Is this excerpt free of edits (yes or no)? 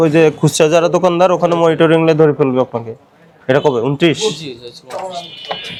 yes